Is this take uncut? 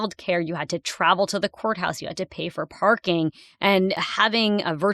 no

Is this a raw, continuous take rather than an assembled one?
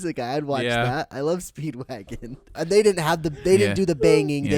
no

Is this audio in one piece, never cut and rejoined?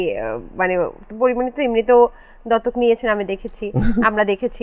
yes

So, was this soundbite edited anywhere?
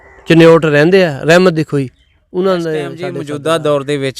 yes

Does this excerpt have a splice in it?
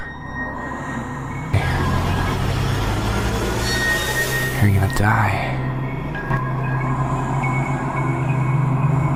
no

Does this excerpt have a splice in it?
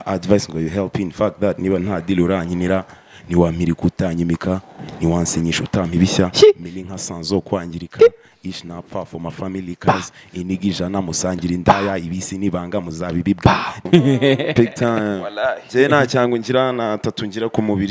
yes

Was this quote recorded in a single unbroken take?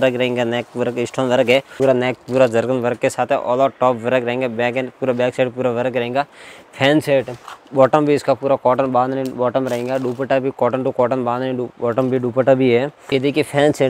no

